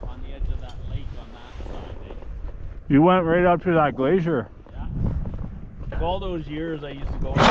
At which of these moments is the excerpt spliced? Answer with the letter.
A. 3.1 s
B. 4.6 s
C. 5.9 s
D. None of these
C